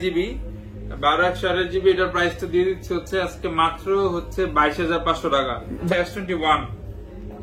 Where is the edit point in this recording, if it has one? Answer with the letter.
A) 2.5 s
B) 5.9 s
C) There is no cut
B